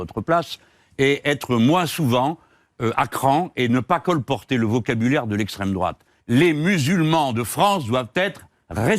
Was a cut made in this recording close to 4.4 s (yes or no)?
no